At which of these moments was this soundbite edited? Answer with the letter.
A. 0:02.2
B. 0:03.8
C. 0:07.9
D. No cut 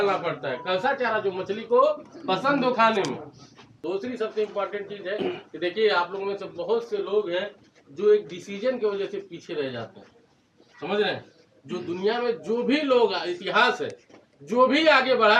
B